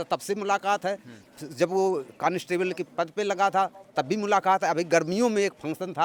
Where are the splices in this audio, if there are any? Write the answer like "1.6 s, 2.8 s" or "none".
none